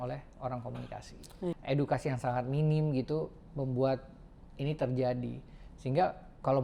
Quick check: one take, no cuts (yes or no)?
no